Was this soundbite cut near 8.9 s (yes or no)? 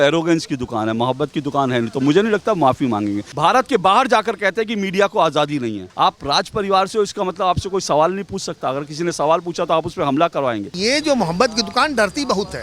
no